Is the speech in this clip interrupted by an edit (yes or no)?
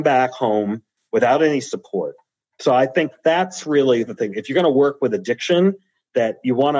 no